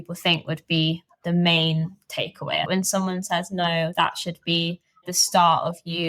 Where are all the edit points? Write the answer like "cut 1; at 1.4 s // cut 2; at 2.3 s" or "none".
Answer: cut 1; at 2.6 s